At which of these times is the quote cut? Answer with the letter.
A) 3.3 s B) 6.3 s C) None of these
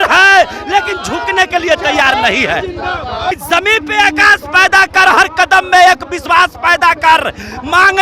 A